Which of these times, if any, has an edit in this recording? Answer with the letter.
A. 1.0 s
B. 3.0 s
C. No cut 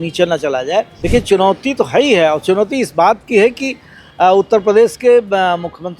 A